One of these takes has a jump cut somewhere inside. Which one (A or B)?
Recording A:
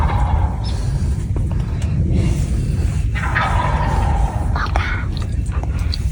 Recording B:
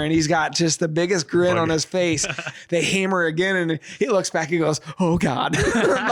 B